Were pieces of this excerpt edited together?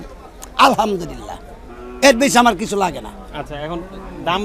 no; 0 cuts

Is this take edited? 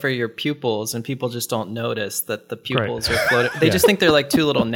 no; 0 cuts

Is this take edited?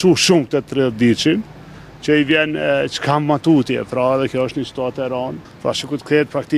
yes; 1 cut; at 5.4 s

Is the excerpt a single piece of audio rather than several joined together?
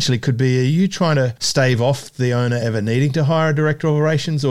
no; 1 cut; at 1.4 s

